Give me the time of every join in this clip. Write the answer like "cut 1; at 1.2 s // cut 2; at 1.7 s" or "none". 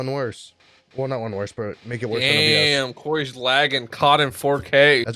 none